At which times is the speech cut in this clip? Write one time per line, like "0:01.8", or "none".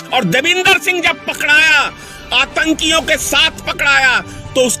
none